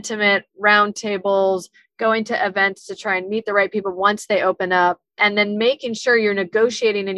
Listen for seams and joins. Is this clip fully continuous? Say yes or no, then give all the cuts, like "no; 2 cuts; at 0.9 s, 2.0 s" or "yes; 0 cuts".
no; 1 cut; at 5.2 s